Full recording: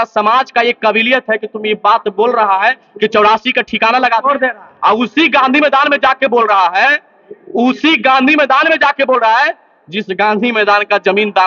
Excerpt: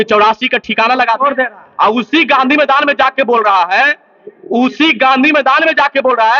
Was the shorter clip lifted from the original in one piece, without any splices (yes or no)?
yes